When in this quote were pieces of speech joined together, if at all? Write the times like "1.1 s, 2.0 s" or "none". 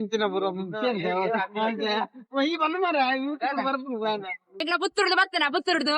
4.6 s

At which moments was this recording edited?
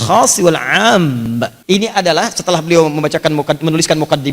1.5 s

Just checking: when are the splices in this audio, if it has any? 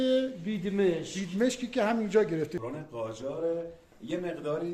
2.6 s

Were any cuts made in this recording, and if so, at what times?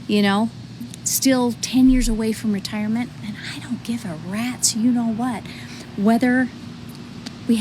none

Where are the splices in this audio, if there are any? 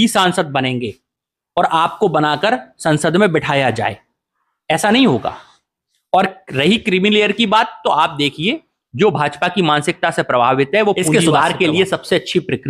11.0 s

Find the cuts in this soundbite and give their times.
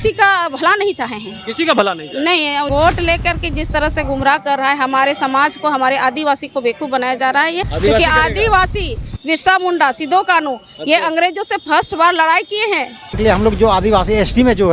2.7 s, 7.6 s, 13.1 s

